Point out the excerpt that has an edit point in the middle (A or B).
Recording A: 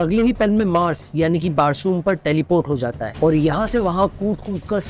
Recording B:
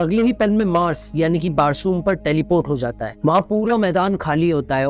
A